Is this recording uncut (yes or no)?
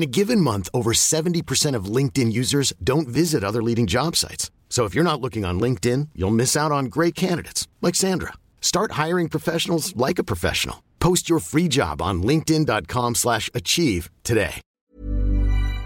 no